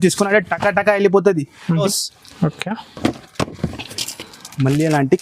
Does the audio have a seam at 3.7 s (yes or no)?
no